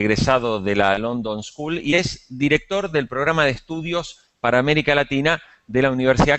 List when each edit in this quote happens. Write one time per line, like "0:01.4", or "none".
0:01.1